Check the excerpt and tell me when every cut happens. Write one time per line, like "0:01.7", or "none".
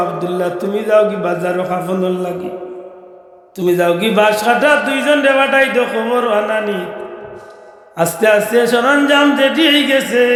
none